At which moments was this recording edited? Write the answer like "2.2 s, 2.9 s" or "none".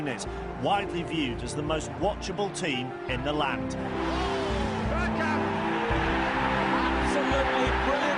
2.6 s